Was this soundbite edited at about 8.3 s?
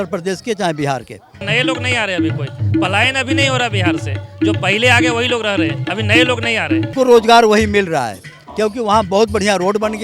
no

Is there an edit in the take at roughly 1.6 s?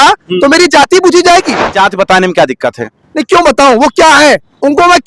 yes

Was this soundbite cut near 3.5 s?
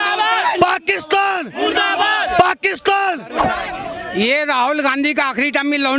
yes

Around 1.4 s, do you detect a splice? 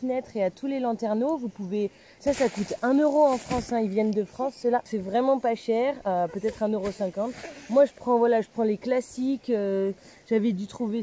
no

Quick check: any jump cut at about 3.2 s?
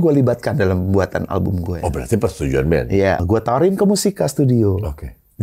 yes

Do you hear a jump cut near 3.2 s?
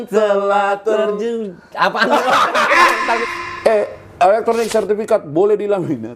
yes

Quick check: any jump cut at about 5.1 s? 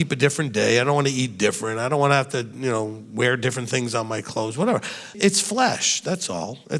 yes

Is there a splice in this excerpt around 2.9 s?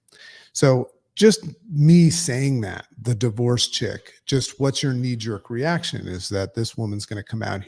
no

